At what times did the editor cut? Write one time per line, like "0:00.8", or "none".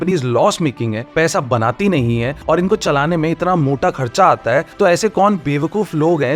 none